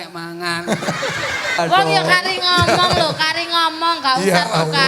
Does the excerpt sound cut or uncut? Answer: cut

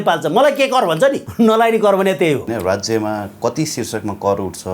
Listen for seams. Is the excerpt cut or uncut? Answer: cut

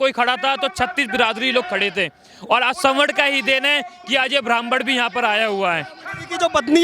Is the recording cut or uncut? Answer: uncut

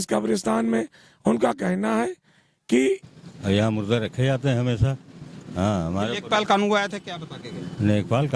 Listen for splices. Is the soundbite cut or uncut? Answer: cut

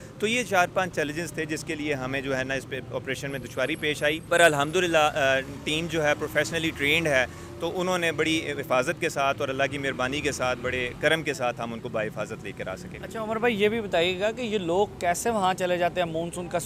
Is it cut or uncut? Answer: uncut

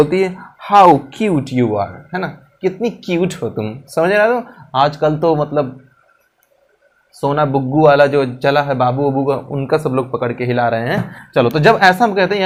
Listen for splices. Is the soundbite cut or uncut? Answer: uncut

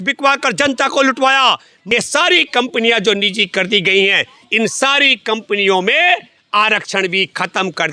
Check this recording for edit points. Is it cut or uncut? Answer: cut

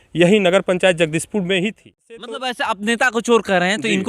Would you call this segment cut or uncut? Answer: cut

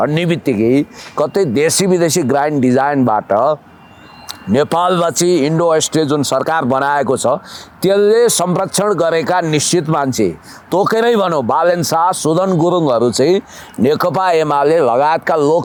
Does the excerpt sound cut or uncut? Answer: uncut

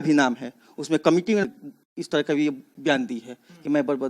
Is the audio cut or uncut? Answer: cut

